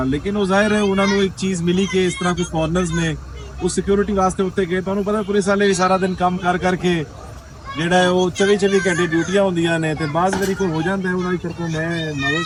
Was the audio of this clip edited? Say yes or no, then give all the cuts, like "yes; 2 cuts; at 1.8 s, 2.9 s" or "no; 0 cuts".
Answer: no; 0 cuts